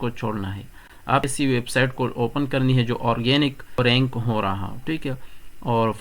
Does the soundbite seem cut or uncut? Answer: cut